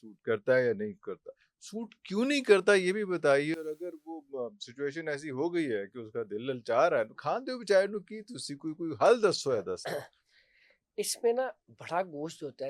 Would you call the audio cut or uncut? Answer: uncut